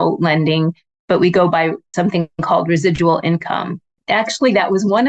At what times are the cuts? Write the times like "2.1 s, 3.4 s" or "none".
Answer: 1.8 s, 3.9 s